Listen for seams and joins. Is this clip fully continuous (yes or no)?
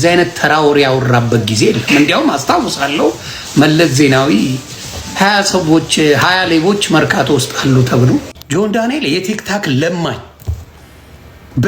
no